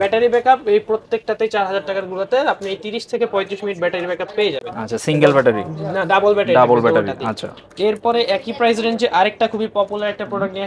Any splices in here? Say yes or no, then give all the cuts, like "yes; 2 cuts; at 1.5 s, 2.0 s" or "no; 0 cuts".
no; 0 cuts